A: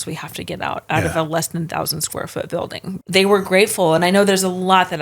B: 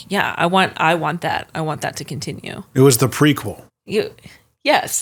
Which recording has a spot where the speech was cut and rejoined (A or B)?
A